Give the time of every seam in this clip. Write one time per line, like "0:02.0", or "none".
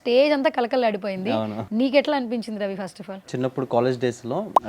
0:01.6
0:03.3